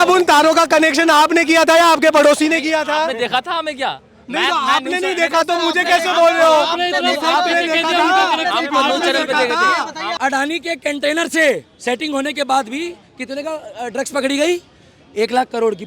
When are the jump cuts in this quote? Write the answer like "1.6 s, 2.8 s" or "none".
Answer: 10.1 s